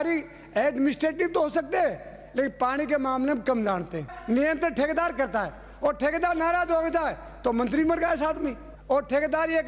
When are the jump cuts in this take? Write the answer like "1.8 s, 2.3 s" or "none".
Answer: 4.1 s, 8.7 s